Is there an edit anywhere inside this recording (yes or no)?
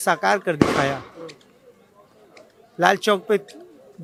no